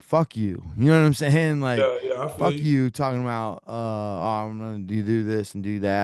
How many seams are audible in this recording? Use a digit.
0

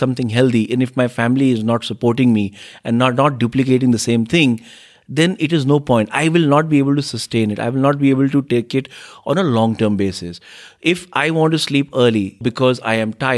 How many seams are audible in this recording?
1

